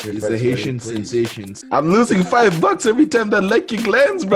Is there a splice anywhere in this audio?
yes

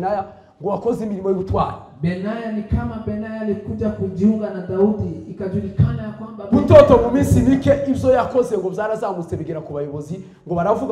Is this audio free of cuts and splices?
yes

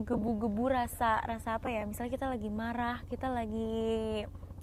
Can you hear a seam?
no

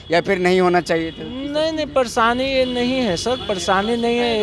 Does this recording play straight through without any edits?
yes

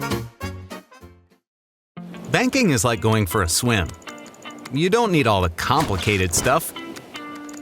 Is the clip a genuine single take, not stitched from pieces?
no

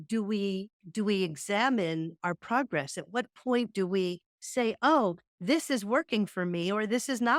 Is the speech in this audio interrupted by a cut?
no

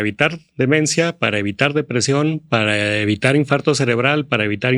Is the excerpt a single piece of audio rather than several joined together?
yes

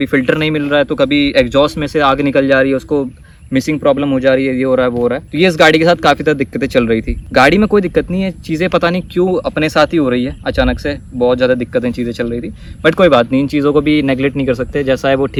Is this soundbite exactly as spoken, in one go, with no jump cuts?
yes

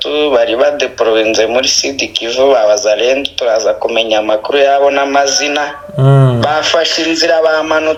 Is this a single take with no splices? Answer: yes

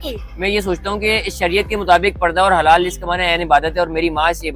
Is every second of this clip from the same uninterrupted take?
yes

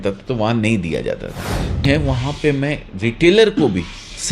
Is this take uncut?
no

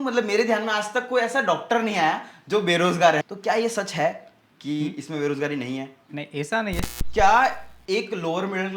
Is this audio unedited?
no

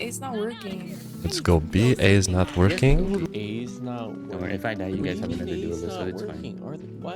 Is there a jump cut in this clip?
yes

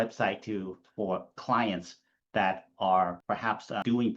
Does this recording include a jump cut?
yes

